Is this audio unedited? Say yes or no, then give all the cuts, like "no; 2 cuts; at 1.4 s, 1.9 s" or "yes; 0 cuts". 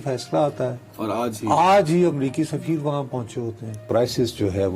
no; 1 cut; at 3.8 s